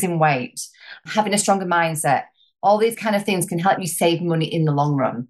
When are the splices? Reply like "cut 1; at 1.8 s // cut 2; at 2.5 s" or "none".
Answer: cut 1; at 1.0 s // cut 2; at 3.8 s